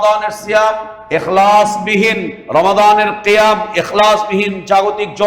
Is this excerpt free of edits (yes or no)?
no